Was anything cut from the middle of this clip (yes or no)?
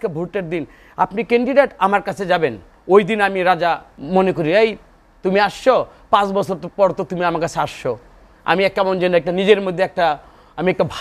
yes